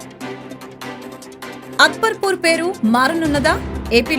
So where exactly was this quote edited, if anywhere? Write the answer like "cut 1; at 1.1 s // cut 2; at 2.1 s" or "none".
cut 1; at 1.6 s